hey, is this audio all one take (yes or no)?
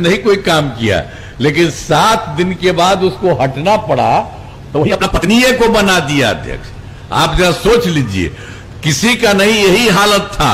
yes